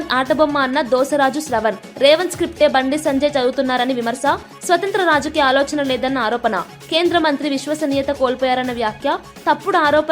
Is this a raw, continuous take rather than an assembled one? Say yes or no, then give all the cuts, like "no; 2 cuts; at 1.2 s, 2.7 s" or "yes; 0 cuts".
yes; 0 cuts